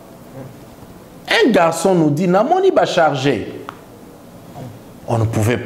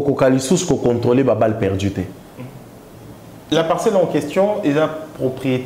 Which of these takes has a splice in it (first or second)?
second